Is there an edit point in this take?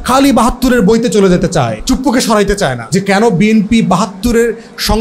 yes; 2 cuts; at 1.8 s, 2.8 s

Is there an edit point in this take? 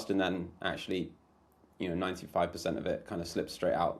no; 0 cuts

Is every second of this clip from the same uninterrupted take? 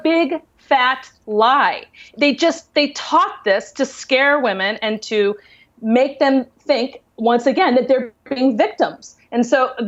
yes; 0 cuts

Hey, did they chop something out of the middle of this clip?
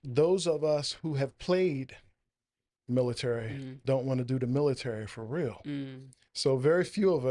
no; 0 cuts

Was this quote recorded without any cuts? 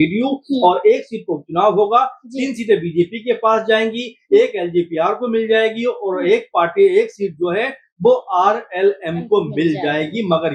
yes; 0 cuts

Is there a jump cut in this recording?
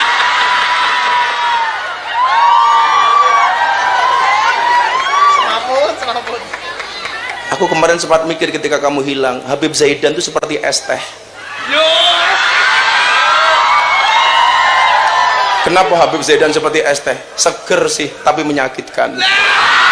no; 0 cuts

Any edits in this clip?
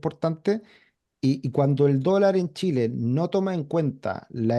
no; 0 cuts

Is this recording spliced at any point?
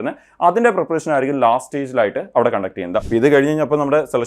yes; 1 cut; at 3.0 s

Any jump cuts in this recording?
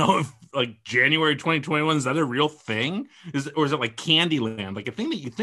no; 0 cuts

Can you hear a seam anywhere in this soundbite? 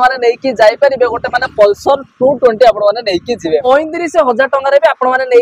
yes; 1 cut; at 3.7 s

